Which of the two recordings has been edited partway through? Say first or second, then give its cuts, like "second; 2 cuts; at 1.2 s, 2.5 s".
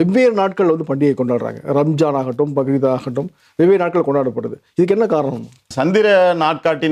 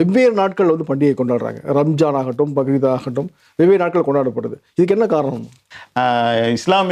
first; 1 cut; at 5.7 s